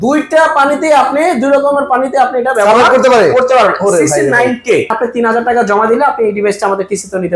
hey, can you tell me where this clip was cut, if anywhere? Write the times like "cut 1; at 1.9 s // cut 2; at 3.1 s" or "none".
cut 1; at 4.9 s